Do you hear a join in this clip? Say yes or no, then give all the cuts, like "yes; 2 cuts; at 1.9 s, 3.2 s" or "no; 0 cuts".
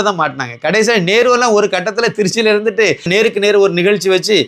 yes; 1 cut; at 3.1 s